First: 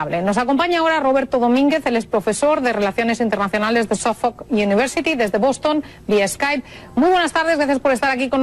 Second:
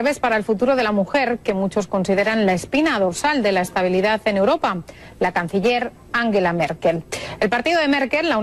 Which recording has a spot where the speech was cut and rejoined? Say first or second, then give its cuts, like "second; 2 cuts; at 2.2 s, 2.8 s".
first; 1 cut; at 1.6 s